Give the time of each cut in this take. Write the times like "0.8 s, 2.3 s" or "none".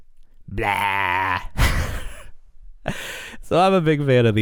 none